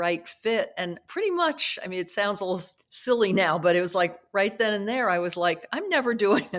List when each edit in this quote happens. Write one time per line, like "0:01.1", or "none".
none